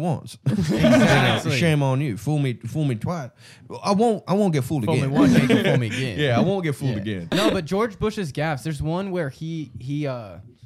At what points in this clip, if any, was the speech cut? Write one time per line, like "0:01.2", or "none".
0:07.2